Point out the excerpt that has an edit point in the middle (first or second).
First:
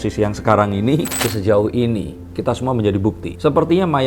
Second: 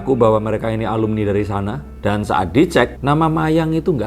first